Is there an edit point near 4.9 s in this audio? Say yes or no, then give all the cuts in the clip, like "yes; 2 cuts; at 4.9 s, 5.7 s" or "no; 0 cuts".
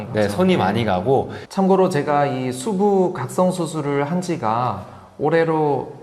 no; 1 cut; at 1.4 s